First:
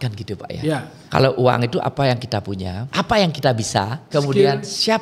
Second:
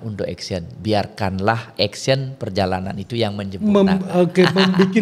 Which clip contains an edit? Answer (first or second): first